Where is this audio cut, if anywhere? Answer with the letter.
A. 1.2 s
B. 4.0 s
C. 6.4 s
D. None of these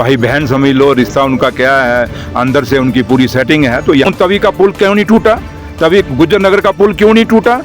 B